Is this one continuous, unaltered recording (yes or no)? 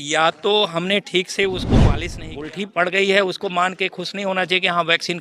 no